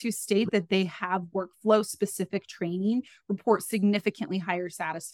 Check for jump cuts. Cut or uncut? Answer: uncut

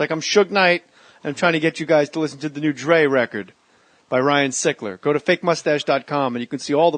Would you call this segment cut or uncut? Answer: uncut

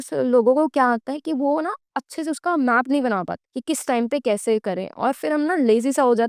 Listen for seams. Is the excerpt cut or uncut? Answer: uncut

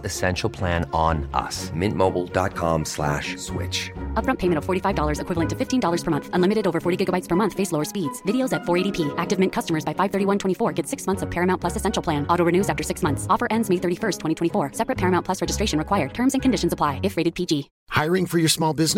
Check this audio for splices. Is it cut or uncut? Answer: uncut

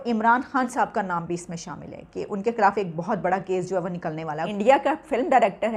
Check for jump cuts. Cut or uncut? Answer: cut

